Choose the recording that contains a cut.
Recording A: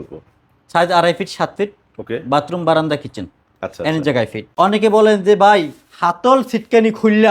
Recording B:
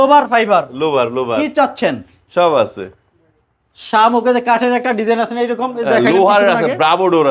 A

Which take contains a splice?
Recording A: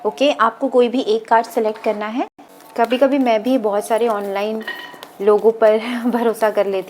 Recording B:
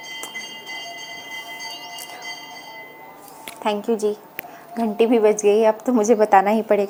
A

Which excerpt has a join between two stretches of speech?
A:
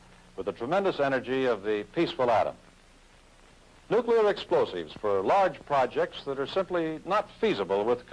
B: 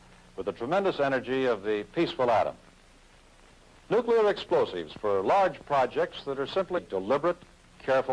A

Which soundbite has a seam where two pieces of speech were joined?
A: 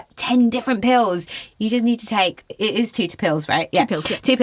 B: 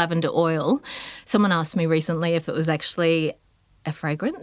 A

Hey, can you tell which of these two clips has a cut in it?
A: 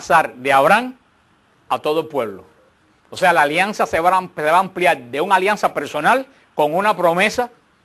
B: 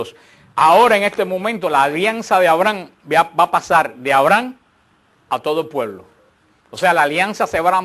A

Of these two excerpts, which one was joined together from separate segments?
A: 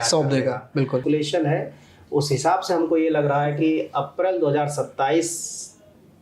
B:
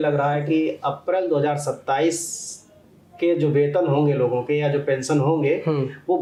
A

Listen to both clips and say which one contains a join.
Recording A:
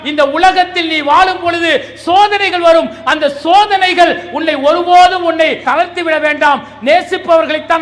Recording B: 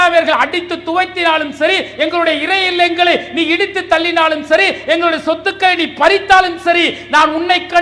A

